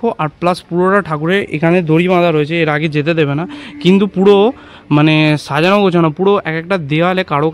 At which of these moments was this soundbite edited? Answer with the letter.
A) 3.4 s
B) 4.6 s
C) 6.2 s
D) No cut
D